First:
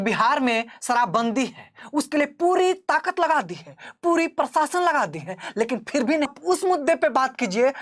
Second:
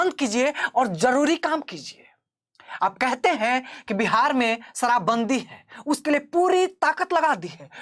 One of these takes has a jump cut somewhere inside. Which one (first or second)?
first